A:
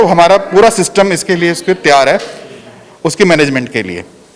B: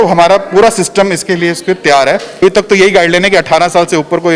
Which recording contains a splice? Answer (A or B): B